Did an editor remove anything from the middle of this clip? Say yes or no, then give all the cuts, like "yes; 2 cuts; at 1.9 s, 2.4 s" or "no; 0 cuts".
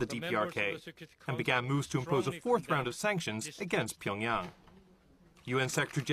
yes; 1 cut; at 2.0 s